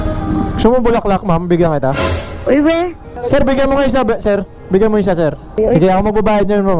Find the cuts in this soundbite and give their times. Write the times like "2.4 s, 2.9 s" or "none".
3.1 s, 5.6 s